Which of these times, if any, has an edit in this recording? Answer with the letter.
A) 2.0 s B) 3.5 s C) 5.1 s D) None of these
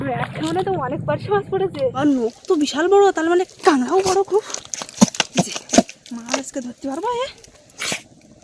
A